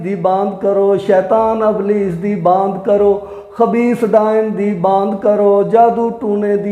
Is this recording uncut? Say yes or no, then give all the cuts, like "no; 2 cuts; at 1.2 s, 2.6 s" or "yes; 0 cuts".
yes; 0 cuts